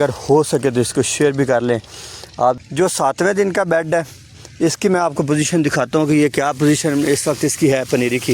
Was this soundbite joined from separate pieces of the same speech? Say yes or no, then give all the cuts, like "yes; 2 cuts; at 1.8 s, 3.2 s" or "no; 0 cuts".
yes; 1 cut; at 2.6 s